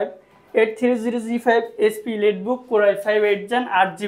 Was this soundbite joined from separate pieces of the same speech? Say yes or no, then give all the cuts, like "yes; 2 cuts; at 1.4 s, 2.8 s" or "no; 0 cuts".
no; 0 cuts